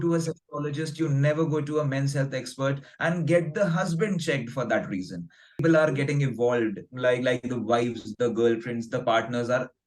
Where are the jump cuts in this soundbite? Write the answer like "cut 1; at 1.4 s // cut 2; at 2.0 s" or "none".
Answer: cut 1; at 5.6 s